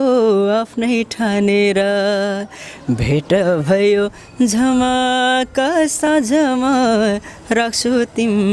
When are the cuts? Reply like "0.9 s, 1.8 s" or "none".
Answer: none